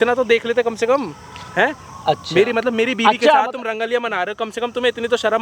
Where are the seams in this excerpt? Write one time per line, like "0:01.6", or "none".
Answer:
none